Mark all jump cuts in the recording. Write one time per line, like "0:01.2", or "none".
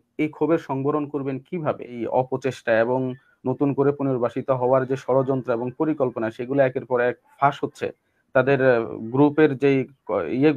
0:02.0